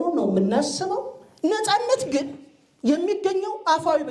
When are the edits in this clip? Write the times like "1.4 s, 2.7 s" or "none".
1.2 s